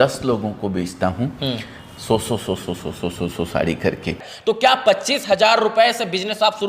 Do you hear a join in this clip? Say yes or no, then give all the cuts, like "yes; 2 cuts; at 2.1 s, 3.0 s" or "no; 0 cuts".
yes; 1 cut; at 4.3 s